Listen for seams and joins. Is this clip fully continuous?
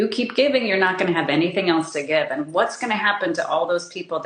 yes; 0 cuts

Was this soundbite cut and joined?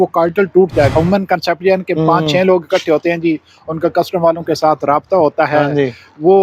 yes; 1 cut; at 0.9 s

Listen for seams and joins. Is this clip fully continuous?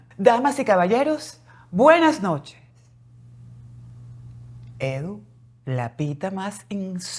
yes; 0 cuts

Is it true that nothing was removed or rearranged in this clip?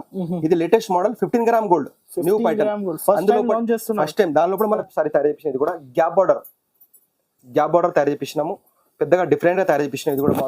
no; 1 cut; at 4.6 s

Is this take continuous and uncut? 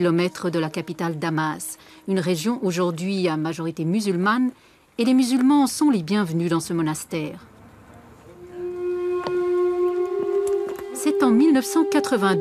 no; 1 cut; at 10.4 s

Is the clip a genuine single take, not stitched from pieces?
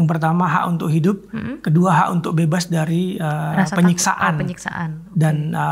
yes; 0 cuts

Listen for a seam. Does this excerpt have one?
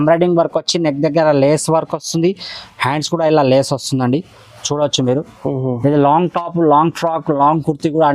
no; 0 cuts

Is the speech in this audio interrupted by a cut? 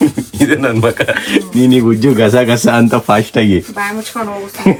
no; 0 cuts

